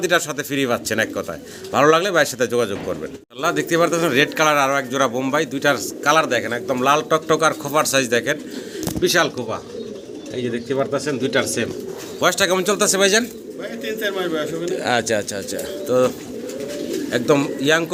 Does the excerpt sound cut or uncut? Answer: uncut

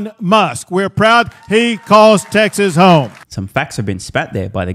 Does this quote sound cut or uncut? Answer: uncut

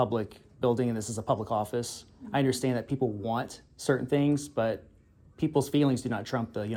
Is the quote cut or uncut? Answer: uncut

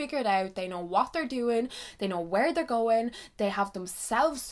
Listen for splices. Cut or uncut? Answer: uncut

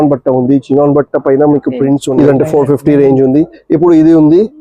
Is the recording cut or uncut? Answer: cut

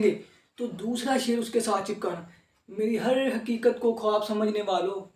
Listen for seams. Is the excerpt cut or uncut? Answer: uncut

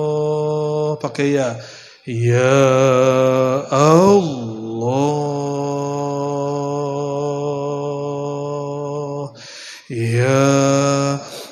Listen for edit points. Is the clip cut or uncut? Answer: uncut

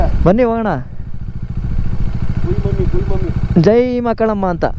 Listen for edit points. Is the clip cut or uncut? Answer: uncut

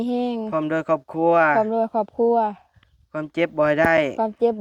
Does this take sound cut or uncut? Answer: uncut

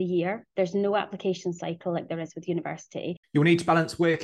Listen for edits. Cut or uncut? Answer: cut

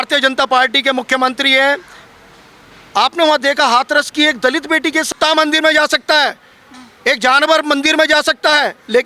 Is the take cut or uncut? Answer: cut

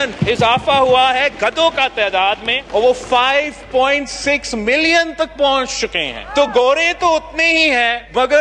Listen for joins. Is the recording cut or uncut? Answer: uncut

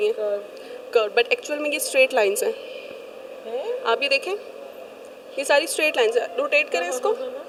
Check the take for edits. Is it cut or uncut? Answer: uncut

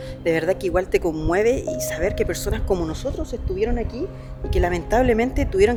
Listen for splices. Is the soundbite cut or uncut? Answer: uncut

